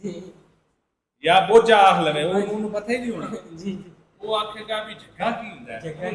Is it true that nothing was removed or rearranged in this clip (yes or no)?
yes